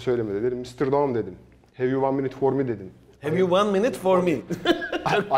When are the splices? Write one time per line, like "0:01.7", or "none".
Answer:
none